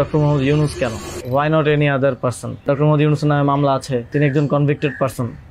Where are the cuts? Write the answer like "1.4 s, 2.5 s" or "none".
1.1 s, 2.6 s, 4.1 s